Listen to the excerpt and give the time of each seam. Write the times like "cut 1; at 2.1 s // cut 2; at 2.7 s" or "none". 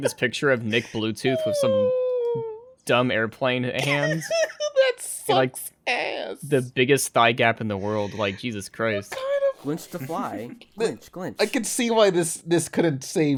none